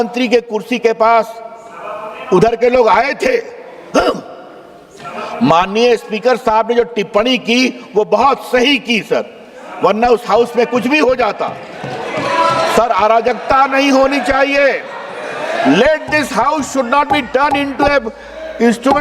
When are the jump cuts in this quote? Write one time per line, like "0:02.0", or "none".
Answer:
none